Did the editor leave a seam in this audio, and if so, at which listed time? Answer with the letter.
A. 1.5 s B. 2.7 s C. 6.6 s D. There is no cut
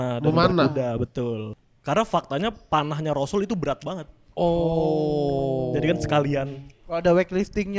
A